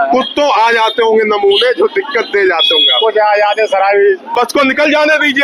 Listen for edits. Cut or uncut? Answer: cut